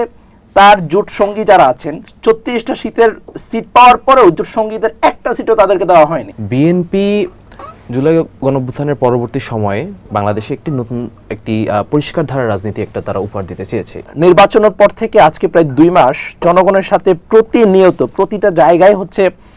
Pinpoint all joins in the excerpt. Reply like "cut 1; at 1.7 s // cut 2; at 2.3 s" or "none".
cut 1; at 6.3 s // cut 2; at 13.9 s